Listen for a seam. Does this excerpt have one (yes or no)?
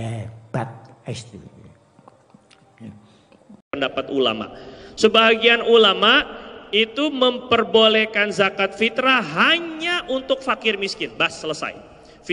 yes